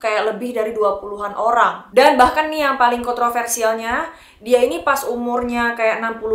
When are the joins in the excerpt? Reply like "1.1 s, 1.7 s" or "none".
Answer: 1.8 s